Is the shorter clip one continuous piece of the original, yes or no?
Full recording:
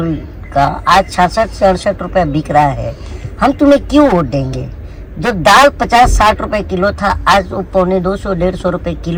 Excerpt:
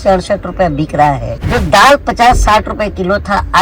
no